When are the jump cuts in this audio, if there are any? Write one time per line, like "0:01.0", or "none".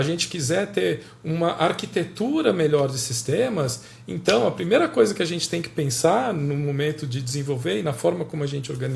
none